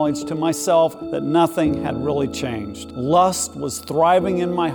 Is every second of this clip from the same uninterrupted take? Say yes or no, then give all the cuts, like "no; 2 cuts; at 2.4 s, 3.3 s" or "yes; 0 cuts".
no; 2 cuts; at 1.0 s, 2.8 s